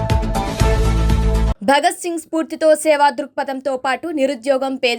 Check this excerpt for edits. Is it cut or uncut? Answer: uncut